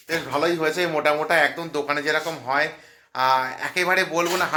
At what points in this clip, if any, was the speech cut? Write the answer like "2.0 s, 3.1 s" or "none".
none